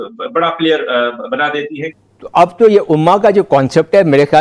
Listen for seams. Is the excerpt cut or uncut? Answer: cut